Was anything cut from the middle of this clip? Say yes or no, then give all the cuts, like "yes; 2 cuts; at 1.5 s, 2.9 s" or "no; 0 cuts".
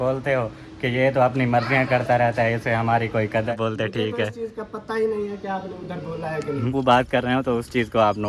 yes; 2 cuts; at 3.5 s, 6.7 s